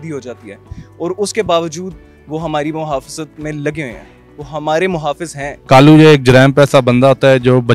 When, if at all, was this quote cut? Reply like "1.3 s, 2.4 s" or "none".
5.6 s